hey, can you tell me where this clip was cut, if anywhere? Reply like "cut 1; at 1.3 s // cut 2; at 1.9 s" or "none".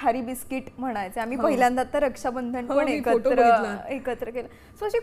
none